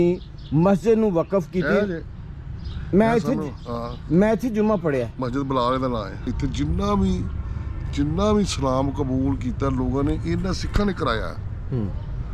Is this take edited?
yes; 1 cut; at 6.3 s

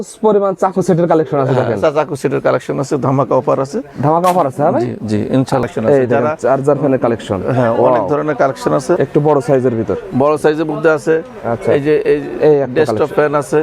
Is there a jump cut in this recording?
yes; 2 cuts; at 5.7 s, 9.0 s

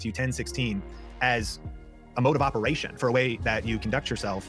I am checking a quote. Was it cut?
no; 0 cuts

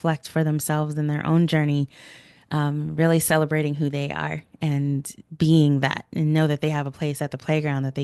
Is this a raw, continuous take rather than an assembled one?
yes; 0 cuts

